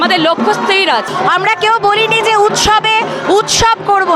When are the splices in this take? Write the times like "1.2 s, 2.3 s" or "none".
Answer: 1.1 s